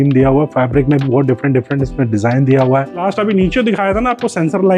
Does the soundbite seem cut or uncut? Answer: cut